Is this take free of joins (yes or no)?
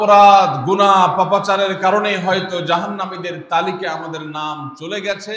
yes